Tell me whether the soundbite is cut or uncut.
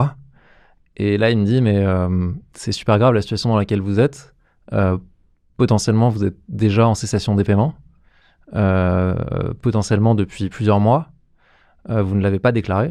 uncut